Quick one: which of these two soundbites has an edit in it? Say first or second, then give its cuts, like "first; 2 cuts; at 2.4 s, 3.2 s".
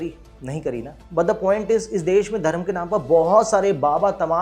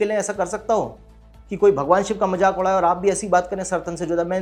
first; 1 cut; at 0.9 s